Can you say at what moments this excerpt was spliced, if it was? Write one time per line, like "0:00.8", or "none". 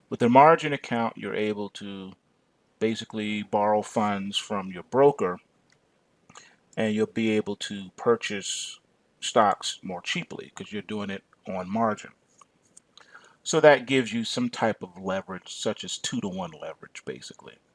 0:15.1